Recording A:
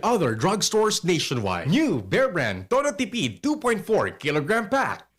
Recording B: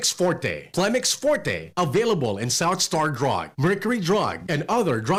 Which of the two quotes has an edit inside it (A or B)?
A